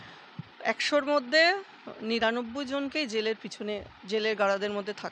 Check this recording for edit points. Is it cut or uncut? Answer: uncut